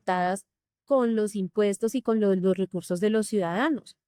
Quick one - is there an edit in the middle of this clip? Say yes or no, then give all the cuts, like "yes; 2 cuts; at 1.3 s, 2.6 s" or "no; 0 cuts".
no; 0 cuts